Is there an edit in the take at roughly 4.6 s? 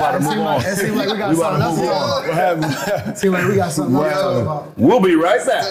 no; 0 cuts

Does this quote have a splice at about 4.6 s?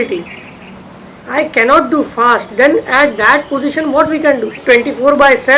yes; 1 cut; at 4.6 s

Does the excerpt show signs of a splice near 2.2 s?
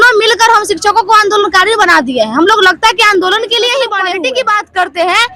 no; 1 cut; at 4.1 s

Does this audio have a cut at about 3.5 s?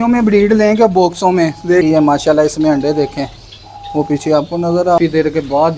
no; 2 cuts; at 1.8 s, 5.0 s

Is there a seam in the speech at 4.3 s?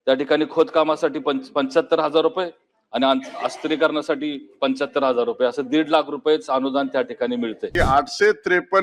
no; 1 cut; at 7.7 s

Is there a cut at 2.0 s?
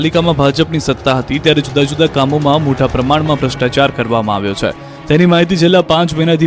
no; 1 cut; at 4.5 s

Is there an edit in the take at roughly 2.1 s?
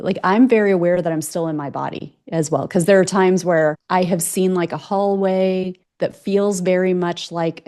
no; 2 cuts; at 3.8 s, 5.8 s

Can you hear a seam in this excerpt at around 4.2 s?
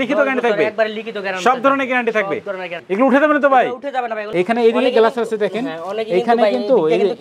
yes; 2 cuts; at 2.8 s, 4.2 s

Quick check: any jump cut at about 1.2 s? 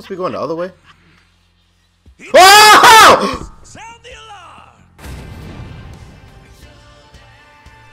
no; 1 cut; at 4.9 s

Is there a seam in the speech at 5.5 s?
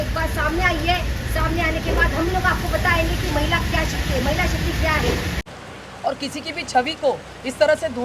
yes; 1 cut; at 5.5 s

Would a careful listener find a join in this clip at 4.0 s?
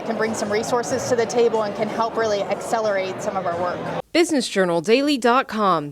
yes; 1 cut; at 4.0 s

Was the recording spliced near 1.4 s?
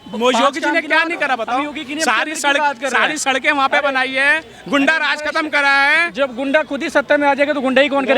no; 0 cuts

